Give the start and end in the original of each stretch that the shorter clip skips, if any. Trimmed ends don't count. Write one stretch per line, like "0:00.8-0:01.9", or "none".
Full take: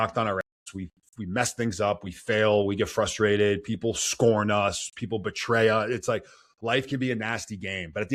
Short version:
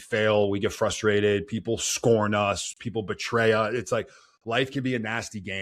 none

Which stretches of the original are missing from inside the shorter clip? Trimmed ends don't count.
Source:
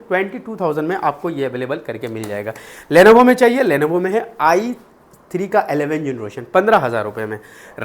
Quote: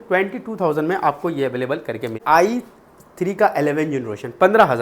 0:02.2-0:04.3

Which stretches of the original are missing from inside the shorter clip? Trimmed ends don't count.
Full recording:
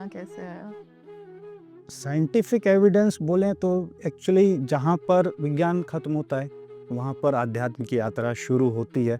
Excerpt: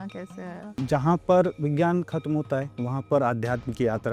0:00.8-0:04.6
0:06.6-0:06.9

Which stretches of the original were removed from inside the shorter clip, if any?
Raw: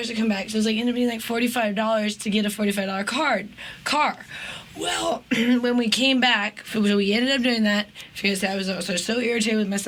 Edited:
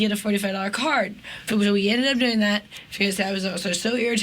0:03.6-0:06.5

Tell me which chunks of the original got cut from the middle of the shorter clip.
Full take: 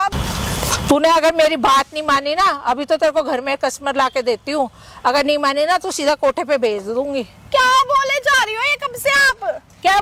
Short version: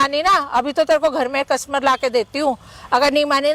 none

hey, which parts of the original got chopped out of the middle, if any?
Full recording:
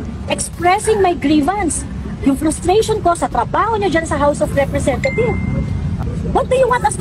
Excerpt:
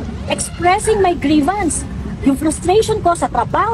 none

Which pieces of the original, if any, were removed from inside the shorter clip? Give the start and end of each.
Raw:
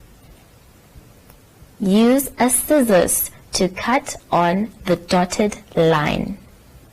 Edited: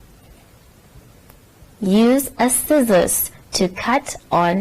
none

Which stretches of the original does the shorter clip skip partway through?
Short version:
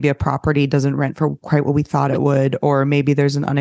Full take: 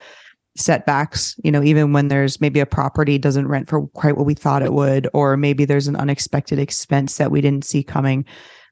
none

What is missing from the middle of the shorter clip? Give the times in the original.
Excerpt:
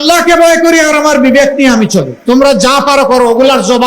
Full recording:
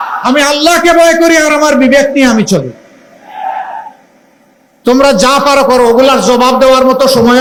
0:02.7-0:04.7

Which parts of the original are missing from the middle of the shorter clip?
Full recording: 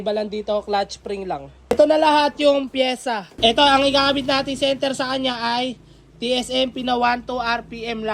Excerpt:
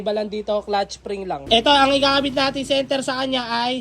0:01.4-0:03.3

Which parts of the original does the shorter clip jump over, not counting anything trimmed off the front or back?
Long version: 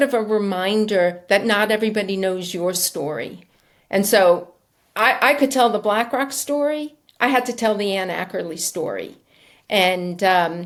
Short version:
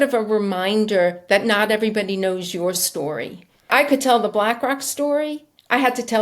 0:03.7-0:05.2

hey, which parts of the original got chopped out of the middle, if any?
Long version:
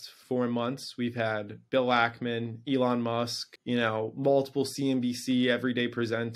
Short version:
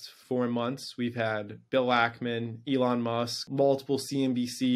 0:03.5-0:04.1

